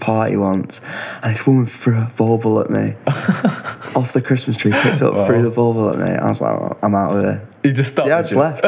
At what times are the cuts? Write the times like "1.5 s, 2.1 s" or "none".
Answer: none